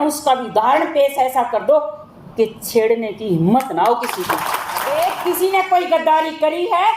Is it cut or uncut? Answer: cut